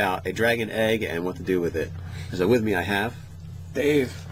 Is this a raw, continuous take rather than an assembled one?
yes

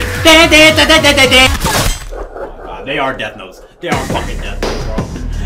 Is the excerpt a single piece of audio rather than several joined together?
no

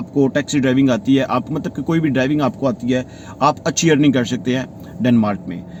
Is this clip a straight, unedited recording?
yes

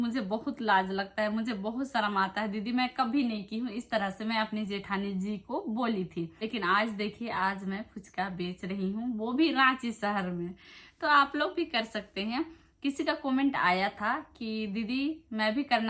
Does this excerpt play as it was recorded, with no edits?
yes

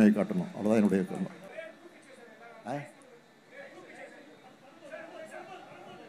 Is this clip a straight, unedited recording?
no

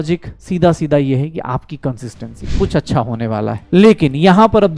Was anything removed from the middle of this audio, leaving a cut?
yes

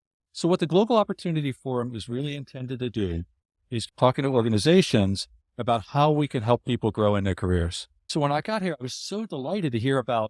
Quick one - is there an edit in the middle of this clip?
yes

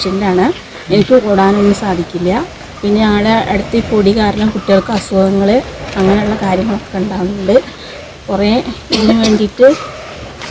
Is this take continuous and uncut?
yes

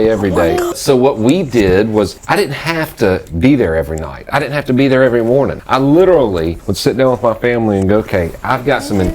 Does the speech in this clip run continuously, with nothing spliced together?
no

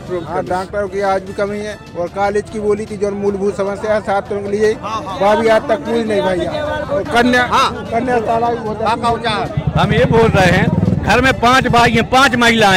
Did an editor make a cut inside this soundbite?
no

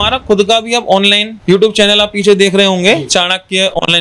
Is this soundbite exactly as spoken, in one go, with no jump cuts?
no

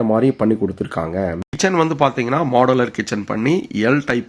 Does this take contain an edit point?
yes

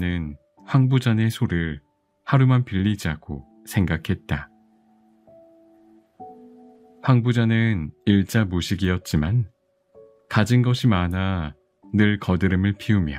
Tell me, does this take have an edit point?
yes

